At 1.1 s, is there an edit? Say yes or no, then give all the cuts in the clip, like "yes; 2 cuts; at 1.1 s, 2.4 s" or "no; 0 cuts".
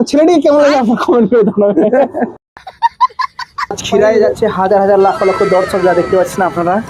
no; 2 cuts; at 2.4 s, 3.8 s